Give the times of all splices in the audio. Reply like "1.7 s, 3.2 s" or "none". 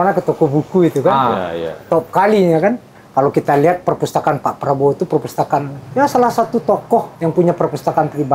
5.8 s, 7.1 s